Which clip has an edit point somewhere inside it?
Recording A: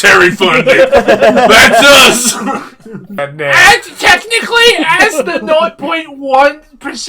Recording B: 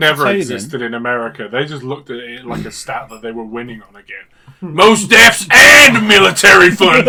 A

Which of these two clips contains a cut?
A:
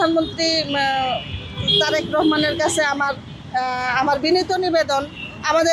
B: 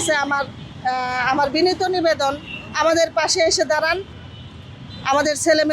B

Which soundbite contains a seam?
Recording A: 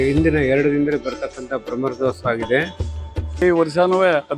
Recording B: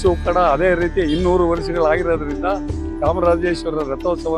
A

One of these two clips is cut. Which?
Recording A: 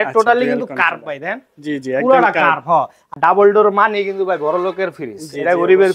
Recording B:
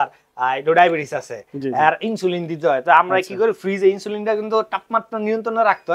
A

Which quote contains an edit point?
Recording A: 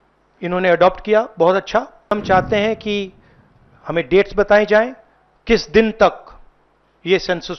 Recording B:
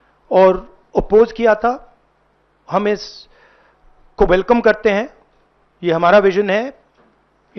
A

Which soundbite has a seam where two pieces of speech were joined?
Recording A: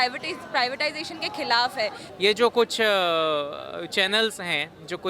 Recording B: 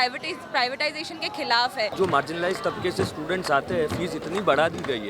B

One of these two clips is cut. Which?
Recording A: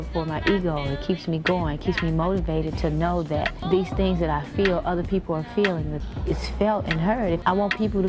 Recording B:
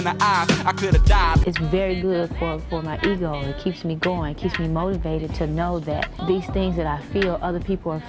B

